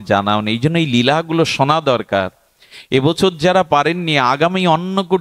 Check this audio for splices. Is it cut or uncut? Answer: uncut